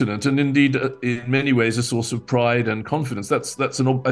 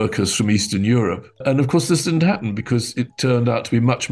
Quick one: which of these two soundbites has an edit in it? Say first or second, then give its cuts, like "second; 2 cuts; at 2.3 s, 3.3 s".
second; 1 cut; at 1.4 s